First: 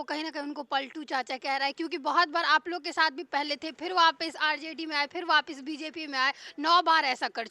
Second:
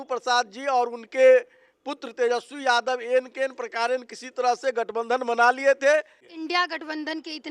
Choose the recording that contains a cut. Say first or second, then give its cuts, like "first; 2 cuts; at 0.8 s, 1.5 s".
second; 1 cut; at 6.2 s